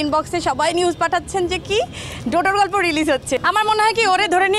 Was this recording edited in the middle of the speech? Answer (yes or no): yes